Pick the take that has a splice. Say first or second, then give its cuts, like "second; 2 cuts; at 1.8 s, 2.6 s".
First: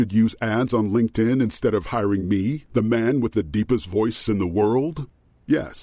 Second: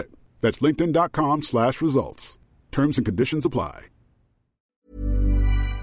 second; 1 cut; at 4.6 s